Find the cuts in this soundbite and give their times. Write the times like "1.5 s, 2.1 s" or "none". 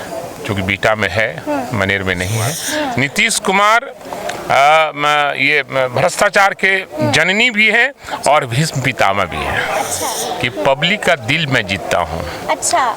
2.6 s, 10.1 s